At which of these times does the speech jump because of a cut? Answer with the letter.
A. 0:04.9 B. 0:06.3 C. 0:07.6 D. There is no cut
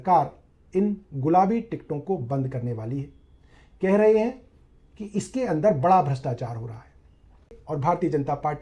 C